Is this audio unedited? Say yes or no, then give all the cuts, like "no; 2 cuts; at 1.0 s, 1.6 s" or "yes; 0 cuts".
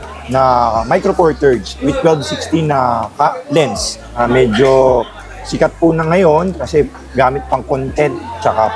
no; 1 cut; at 4.2 s